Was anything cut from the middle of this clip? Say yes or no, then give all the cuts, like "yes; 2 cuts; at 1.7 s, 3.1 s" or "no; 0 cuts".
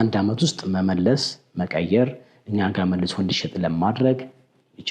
no; 0 cuts